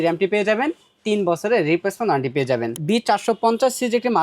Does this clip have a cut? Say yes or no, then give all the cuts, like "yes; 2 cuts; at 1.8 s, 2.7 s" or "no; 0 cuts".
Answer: yes; 1 cut; at 2.7 s